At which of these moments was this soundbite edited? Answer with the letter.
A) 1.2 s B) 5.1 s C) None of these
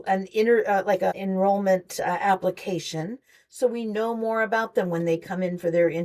A